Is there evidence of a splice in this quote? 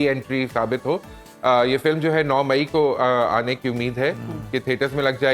no; 0 cuts

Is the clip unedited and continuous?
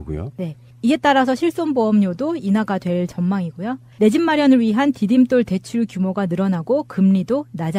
yes; 0 cuts

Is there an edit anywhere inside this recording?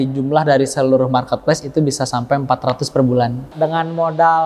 yes; 1 cut; at 3.6 s

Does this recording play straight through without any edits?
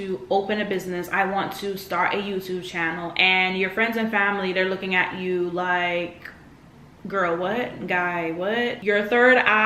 no; 1 cut; at 8.8 s

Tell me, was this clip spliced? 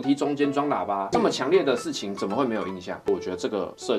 yes; 2 cuts; at 1.0 s, 2.9 s

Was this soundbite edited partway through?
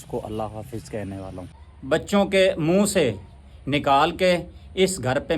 yes; 1 cut; at 1.7 s

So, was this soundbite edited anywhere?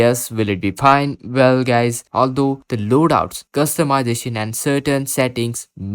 yes; 1 cut; at 2.0 s

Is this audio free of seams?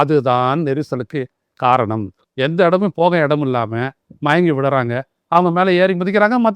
no; 1 cut; at 2.2 s

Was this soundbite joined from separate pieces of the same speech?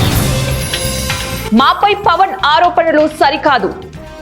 yes; 1 cut; at 1.4 s

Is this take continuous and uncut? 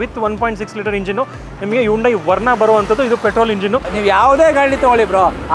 no; 1 cut; at 3.9 s

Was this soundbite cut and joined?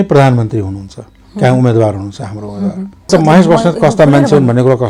yes; 1 cut; at 3.1 s

